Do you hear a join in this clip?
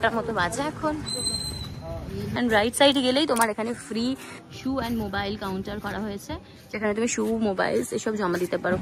yes; 1 cut; at 2.4 s

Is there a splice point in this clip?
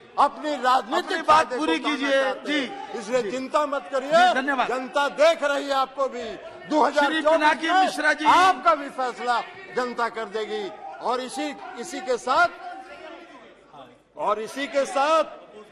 no; 0 cuts

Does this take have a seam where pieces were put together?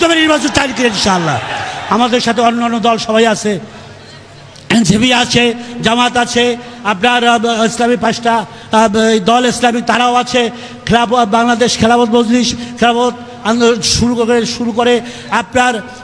no; 0 cuts

